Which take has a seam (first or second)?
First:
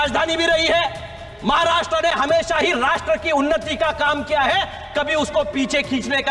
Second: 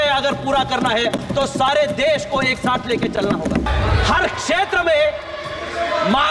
second